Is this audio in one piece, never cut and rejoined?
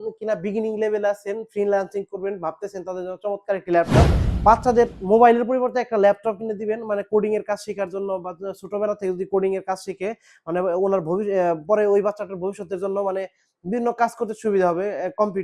no; 1 cut; at 4.2 s

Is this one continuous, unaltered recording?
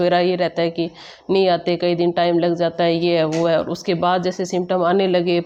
yes; 0 cuts

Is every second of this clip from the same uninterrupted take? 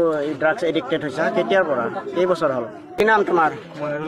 no; 1 cut; at 3.0 s

